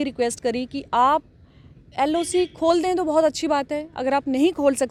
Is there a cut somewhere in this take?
no; 0 cuts

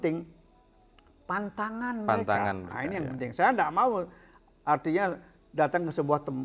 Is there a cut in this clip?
no; 0 cuts

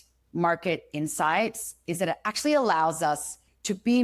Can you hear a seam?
no; 0 cuts

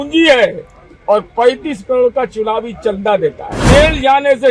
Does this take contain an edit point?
yes; 1 cut; at 3.5 s

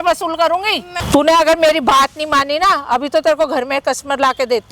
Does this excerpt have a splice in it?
yes; 1 cut; at 0.9 s

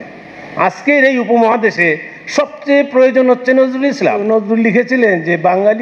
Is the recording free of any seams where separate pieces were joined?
no; 1 cut; at 4.2 s

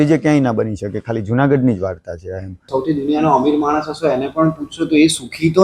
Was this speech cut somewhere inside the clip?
yes; 1 cut; at 2.6 s

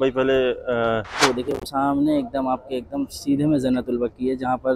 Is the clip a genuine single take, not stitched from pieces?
no; 1 cut; at 1.2 s

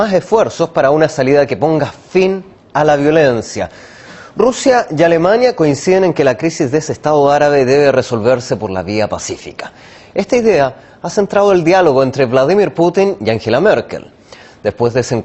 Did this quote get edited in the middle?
yes; 1 cut; at 10.7 s

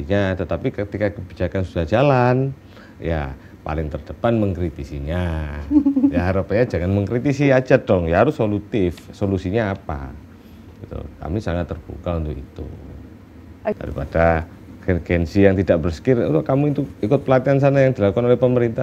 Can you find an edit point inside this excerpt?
yes; 1 cut; at 13.8 s

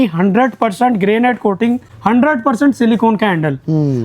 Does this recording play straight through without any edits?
no; 1 cut; at 1.9 s

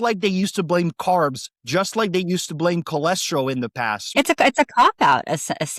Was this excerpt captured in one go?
no; 1 cut; at 4.1 s

